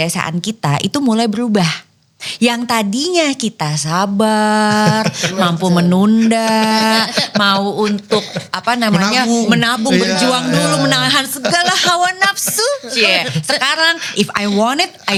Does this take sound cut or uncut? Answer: uncut